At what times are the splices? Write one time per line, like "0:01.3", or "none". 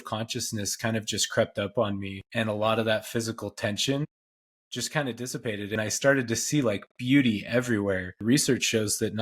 0:02.2
0:05.8
0:08.1